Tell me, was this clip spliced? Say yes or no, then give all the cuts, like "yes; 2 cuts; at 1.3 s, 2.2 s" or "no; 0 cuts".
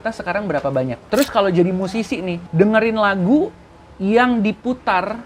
yes; 2 cuts; at 1.0 s, 2.4 s